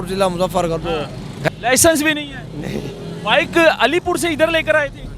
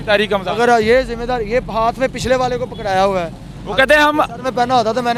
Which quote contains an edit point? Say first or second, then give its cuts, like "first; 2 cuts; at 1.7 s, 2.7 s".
first; 1 cut; at 1.5 s